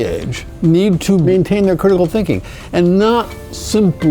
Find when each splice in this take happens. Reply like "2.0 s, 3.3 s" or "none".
1.3 s